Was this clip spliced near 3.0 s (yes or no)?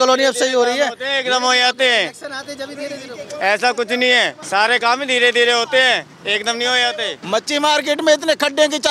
no